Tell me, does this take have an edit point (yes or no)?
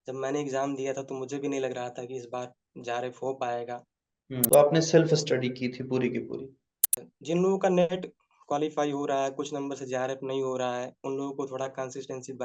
yes